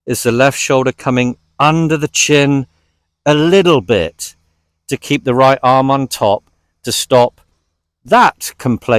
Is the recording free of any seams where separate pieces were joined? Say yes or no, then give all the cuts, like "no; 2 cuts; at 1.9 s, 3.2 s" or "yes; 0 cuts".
yes; 0 cuts